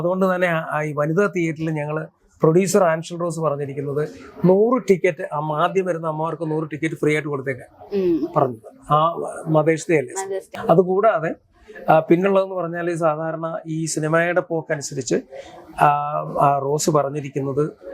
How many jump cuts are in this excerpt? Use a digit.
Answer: 1